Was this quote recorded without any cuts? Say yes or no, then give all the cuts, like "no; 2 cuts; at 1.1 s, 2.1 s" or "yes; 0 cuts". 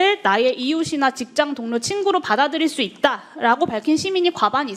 yes; 0 cuts